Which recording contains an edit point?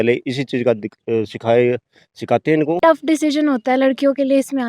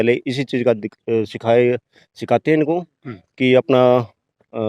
first; 1 cut; at 2.8 s

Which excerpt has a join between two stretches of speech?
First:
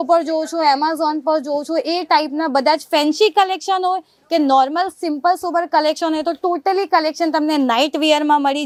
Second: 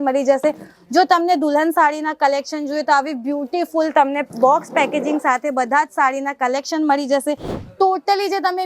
second; 1 cut; at 7.6 s

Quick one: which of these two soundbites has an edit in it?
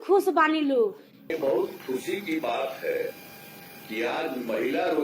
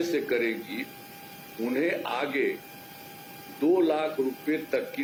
first; 1 cut; at 1.3 s

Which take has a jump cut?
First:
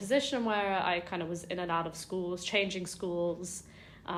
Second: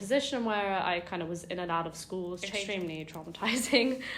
second; 1 cut; at 2.5 s

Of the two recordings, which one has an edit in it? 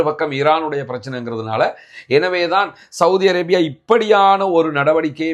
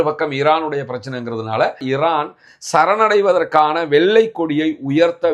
second; 1 cut; at 1.8 s

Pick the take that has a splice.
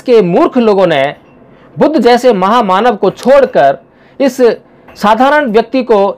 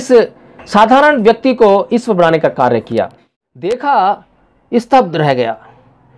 second; 1 cut; at 3.5 s

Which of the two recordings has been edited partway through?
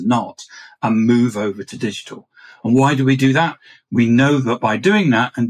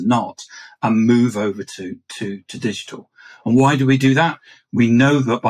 first; 1 cut; at 1.7 s

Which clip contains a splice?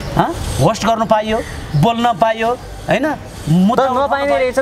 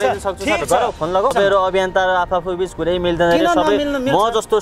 second; 1 cut; at 1.3 s

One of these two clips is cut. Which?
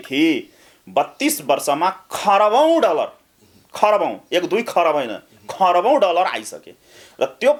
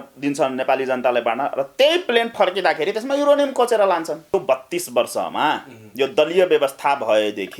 second; 1 cut; at 4.3 s

